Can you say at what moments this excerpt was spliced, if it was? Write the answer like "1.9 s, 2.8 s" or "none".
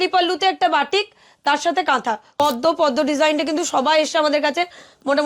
2.3 s